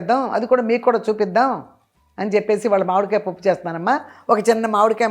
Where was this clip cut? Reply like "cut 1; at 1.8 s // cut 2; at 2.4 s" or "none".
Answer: none